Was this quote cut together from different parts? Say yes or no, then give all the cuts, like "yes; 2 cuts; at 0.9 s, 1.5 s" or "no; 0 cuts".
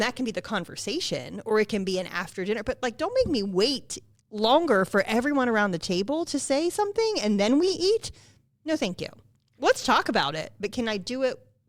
no; 0 cuts